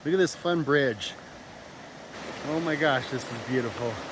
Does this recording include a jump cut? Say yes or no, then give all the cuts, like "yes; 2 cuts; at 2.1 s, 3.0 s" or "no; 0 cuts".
yes; 1 cut; at 2.1 s